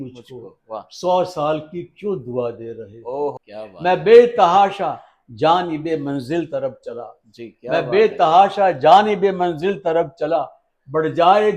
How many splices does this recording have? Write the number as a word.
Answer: one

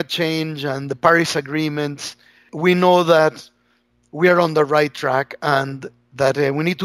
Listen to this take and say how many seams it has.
one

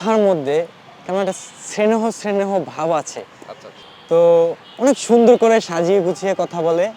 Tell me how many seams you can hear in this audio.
one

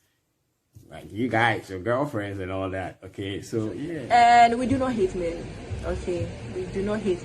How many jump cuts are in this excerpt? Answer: one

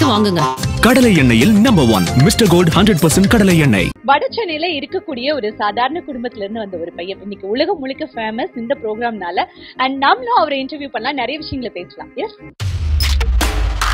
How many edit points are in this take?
one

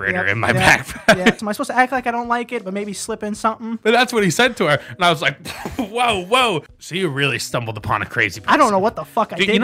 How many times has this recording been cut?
three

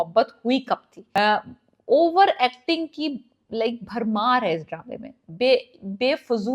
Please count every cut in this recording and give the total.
one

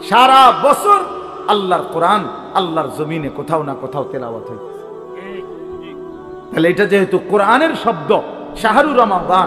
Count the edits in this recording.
zero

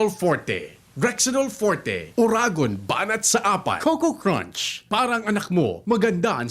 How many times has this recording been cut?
one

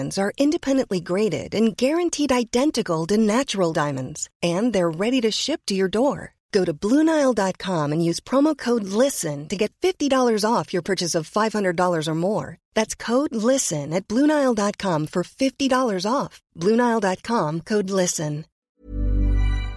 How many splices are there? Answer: one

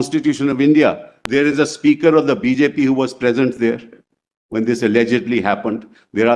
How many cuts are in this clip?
one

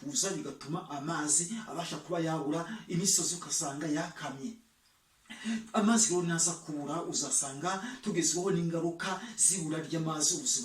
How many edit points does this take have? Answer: zero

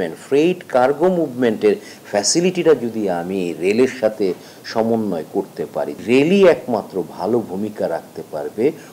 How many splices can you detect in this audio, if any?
one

